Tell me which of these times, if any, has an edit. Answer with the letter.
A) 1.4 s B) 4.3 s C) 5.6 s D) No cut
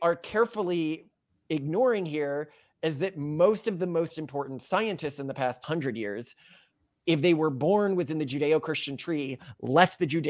C